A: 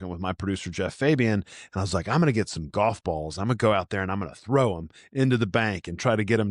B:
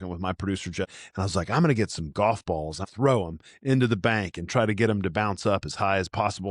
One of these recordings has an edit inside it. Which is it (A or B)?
B